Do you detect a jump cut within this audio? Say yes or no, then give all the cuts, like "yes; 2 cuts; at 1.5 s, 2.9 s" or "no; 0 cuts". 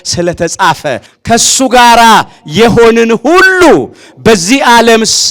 yes; 1 cut; at 1.1 s